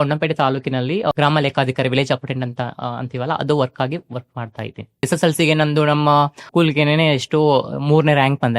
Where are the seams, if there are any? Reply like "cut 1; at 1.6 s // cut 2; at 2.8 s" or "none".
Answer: cut 1; at 1.1 s // cut 2; at 5.1 s // cut 3; at 6.4 s